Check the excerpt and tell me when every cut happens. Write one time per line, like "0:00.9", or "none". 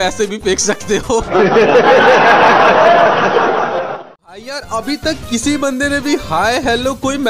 0:03.9